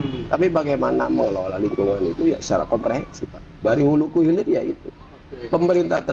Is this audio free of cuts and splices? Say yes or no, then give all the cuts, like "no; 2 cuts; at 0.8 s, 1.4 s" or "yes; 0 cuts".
yes; 0 cuts